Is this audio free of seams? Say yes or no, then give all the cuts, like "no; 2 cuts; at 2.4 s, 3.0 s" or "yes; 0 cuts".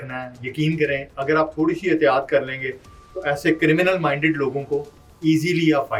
yes; 0 cuts